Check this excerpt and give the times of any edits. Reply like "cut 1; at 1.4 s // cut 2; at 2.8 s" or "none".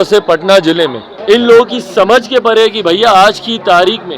cut 1; at 1.1 s

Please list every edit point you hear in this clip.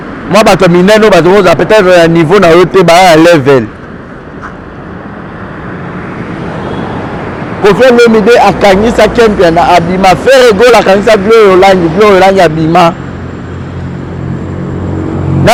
none

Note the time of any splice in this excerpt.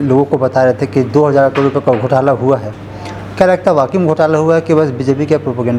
none

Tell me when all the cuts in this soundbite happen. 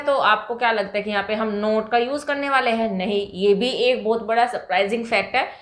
none

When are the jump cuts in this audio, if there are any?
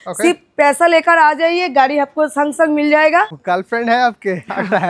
cut 1; at 3.4 s

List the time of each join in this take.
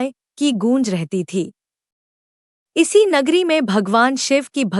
cut 1; at 3.3 s

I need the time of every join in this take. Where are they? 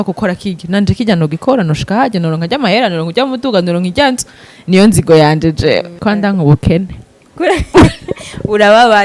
cut 1; at 5.9 s

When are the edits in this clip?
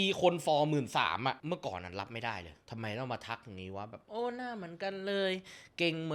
cut 1; at 1.4 s // cut 2; at 2.6 s

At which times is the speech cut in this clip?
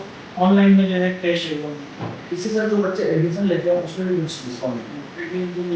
cut 1; at 2.1 s

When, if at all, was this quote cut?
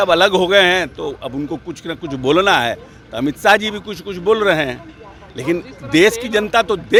none

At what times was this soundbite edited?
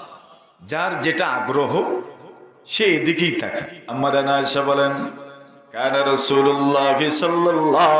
cut 1; at 3.8 s

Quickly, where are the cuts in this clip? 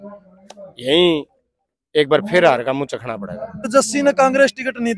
cut 1; at 3.7 s

